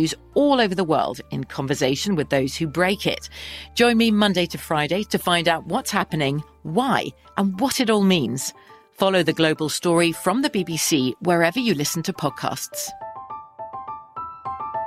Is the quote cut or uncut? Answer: uncut